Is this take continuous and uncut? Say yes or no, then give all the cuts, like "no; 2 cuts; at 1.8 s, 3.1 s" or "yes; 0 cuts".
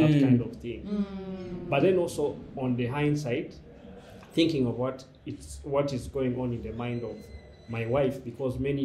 yes; 0 cuts